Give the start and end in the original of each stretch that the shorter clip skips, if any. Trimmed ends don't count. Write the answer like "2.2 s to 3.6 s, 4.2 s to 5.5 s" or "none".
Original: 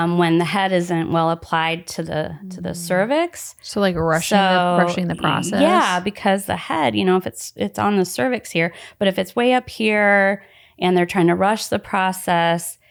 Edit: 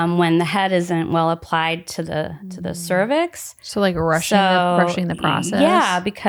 none